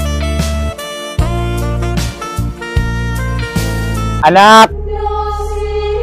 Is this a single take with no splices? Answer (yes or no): yes